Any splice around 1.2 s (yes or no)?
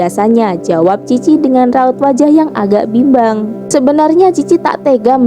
no